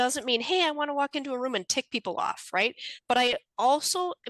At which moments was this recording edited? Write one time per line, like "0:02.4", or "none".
0:02.9